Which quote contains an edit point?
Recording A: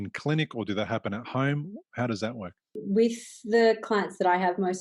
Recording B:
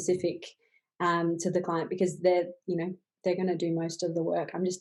A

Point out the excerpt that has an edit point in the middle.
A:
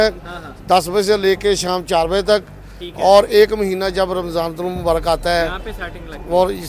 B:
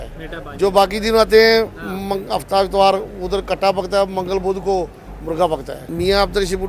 B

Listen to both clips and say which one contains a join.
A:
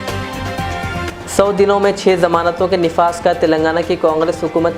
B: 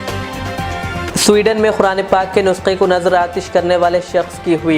B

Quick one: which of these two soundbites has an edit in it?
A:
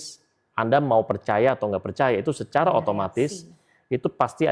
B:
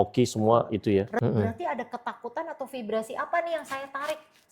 B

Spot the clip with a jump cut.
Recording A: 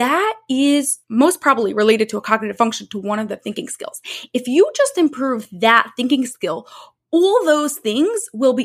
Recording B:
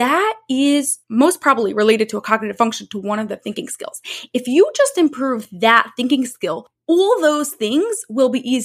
B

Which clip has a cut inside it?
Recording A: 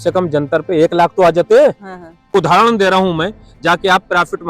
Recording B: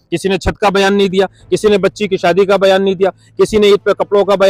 A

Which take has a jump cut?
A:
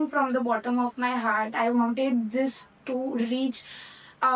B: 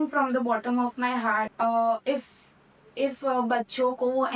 B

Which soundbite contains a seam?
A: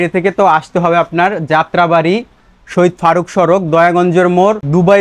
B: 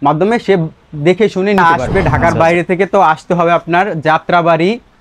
B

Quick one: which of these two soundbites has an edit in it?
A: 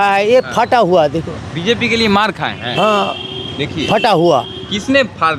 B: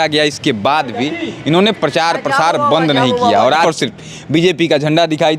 B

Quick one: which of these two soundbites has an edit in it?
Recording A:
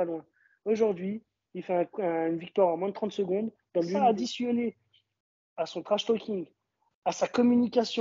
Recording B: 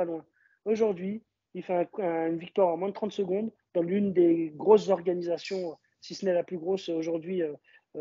A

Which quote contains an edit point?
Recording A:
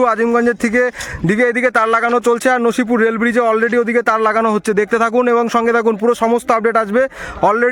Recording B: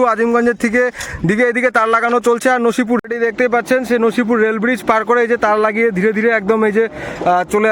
B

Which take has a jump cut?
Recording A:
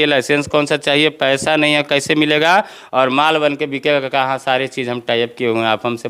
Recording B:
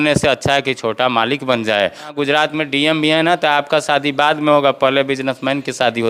B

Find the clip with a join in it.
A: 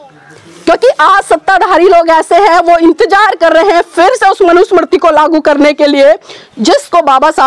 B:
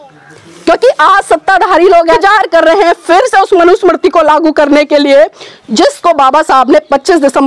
B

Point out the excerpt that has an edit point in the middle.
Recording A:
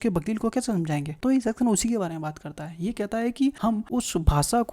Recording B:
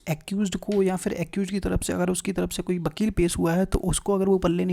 A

